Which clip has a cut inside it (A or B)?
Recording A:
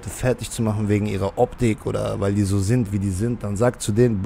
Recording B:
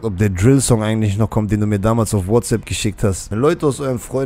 B